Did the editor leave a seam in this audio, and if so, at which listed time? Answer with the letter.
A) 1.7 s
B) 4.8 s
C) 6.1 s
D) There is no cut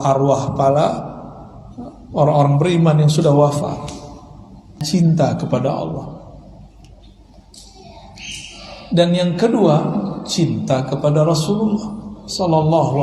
B